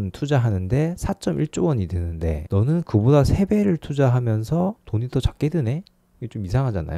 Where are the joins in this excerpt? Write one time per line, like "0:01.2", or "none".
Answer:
none